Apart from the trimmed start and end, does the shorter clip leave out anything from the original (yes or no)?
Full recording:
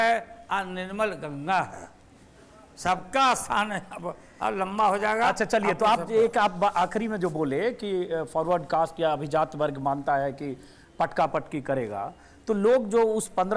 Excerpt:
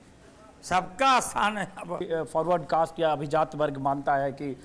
yes